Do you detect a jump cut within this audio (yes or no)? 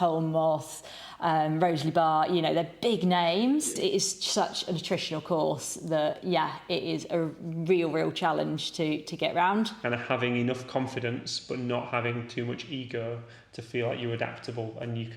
yes